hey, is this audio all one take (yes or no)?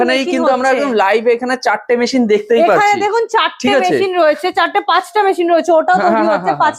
yes